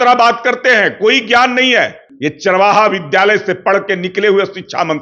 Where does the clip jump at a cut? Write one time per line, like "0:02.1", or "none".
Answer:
0:02.4